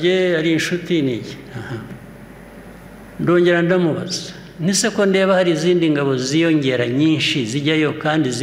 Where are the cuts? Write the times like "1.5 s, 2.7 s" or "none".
none